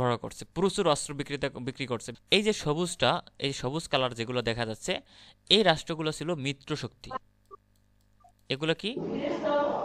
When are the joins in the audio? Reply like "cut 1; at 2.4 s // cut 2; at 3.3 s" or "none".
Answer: cut 1; at 2.2 s